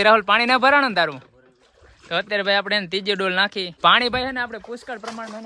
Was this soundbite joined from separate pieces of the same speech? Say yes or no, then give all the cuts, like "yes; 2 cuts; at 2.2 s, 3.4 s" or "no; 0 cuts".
yes; 1 cut; at 3.7 s